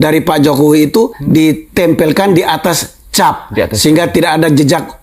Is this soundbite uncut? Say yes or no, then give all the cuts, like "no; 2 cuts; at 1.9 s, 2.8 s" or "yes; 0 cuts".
no; 1 cut; at 1.2 s